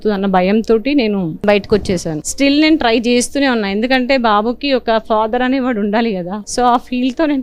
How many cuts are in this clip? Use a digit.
3